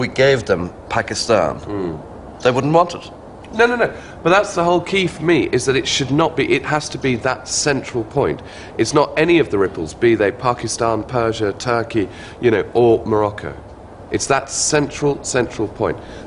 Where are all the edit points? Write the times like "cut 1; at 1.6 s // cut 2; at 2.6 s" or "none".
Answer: none